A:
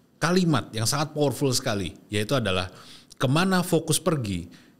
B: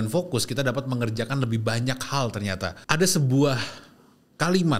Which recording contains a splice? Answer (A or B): B